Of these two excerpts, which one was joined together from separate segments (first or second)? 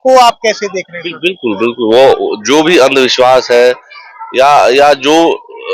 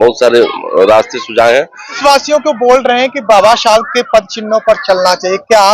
second